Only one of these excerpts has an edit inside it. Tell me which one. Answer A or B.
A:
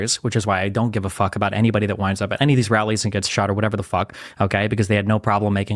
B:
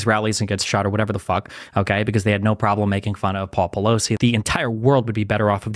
B